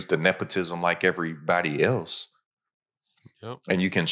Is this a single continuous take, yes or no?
yes